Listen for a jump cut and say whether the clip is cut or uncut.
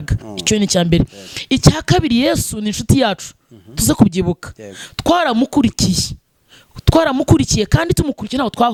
uncut